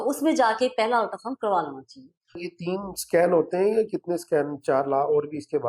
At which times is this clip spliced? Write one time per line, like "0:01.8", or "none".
0:02.5